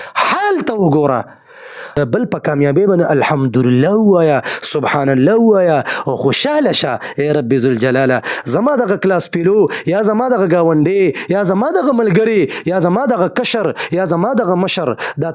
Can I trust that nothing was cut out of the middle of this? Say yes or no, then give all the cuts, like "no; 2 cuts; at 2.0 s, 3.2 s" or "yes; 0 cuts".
no; 1 cut; at 1.9 s